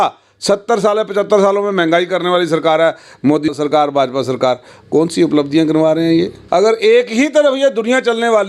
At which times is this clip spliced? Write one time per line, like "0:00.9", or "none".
0:06.4